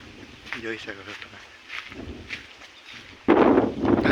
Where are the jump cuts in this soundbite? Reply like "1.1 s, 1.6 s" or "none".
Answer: none